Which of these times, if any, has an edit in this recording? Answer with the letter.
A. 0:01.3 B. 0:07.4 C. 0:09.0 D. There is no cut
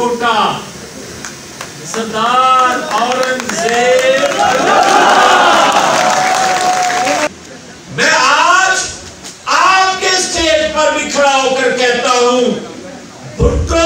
B